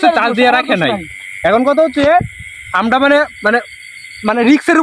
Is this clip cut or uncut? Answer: uncut